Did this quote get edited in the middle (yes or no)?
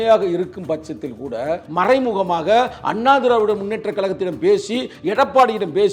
yes